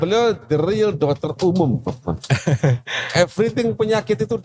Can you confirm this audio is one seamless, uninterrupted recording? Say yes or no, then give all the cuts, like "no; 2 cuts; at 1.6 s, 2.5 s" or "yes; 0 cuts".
yes; 0 cuts